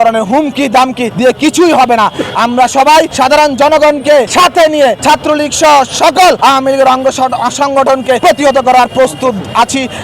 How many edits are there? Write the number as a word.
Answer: six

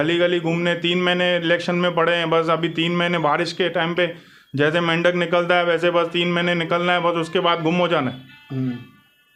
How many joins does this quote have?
zero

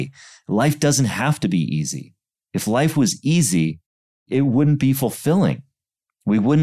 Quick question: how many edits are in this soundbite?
one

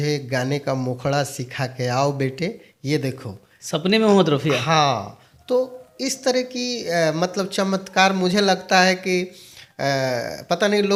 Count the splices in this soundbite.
zero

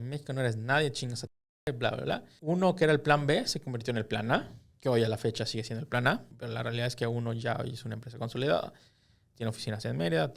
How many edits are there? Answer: two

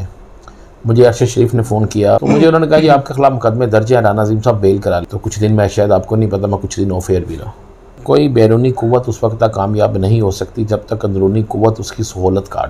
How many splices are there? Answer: three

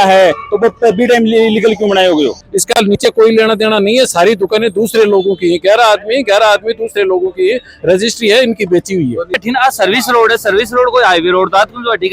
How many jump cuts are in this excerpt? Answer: two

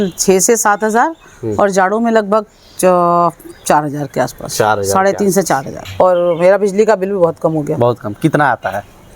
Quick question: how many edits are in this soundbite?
one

